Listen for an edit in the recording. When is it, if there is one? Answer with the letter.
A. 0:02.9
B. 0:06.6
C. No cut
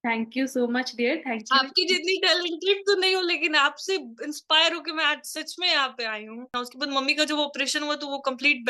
B